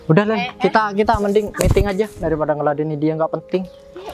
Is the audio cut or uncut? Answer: uncut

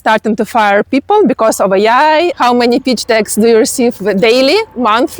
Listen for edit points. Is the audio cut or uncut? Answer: cut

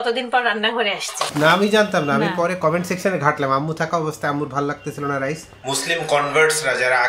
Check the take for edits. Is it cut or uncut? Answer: cut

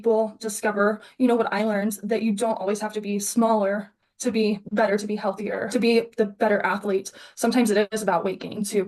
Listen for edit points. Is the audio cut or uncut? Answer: uncut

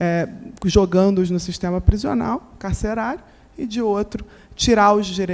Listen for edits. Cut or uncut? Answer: uncut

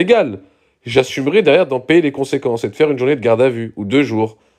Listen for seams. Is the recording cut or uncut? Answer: uncut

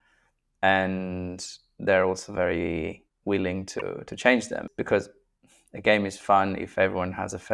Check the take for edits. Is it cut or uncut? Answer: cut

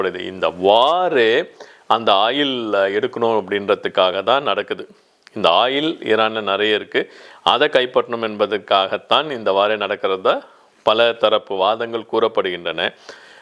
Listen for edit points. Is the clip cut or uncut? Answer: uncut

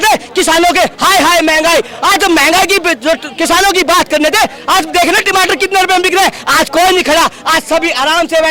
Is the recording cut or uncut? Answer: uncut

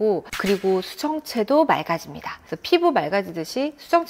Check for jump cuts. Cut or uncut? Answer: uncut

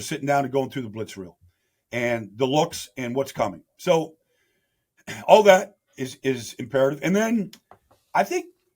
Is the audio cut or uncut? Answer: uncut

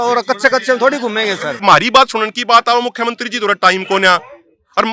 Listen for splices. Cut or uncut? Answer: cut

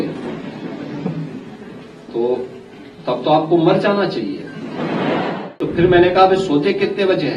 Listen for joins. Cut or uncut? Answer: cut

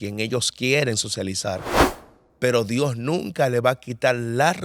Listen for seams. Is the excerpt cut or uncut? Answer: cut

